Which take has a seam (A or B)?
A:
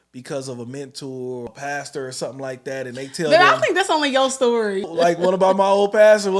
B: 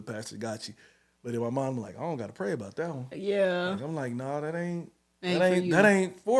A